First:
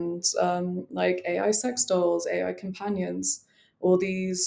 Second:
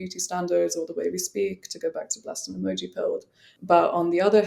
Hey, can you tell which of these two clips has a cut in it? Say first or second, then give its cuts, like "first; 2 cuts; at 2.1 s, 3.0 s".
second; 1 cut; at 3.5 s